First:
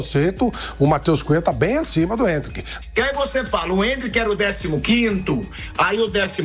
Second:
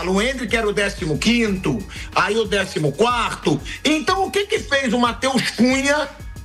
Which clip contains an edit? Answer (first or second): first